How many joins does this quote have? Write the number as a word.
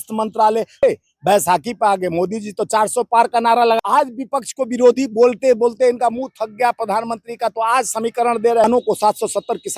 three